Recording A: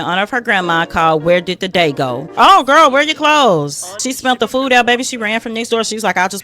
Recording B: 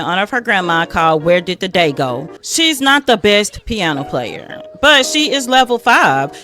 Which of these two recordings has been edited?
A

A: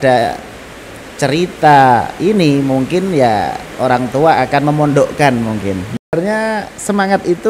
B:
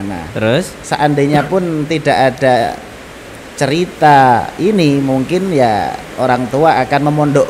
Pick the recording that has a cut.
A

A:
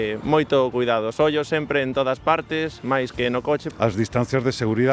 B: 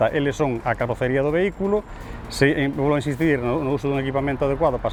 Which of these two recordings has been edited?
A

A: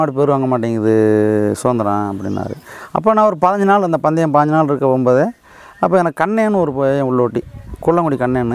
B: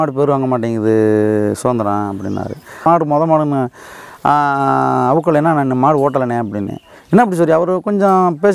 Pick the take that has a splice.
B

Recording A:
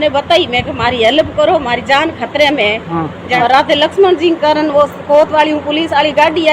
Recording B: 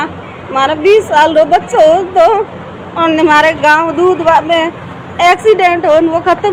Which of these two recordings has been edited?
A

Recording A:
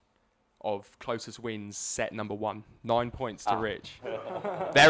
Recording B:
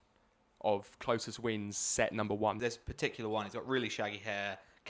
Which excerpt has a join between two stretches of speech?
B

